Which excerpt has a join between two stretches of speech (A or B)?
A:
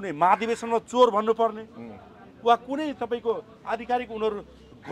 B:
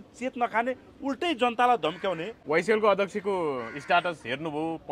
B